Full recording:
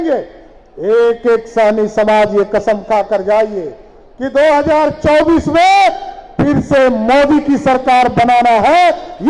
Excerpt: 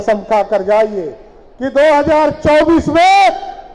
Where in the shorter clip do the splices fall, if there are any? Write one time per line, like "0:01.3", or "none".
none